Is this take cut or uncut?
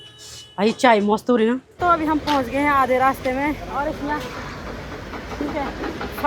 cut